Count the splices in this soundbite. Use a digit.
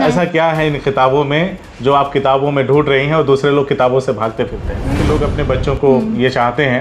1